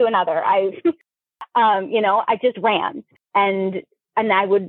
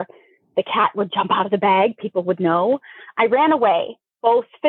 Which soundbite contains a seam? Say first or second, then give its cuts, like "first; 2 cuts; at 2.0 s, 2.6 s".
first; 1 cut; at 3.1 s